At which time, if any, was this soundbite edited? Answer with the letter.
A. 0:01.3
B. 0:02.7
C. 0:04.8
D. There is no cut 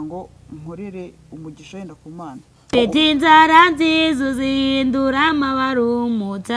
B